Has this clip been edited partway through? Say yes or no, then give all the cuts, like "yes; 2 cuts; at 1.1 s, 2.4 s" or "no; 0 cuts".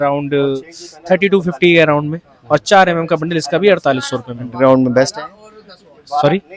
no; 0 cuts